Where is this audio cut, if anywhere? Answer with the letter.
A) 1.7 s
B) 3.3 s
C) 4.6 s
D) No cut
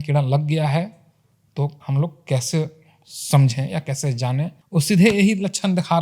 C